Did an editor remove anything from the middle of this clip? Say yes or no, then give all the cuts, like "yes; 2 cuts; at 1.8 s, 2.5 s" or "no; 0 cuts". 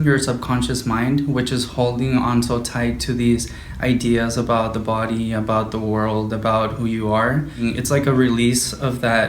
yes; 1 cut; at 7.5 s